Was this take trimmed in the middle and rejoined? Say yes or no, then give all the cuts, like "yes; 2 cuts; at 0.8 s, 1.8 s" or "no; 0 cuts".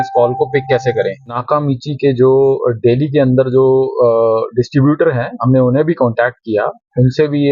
yes; 1 cut; at 1.4 s